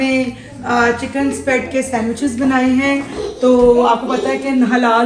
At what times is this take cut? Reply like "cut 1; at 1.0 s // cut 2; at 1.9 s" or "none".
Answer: none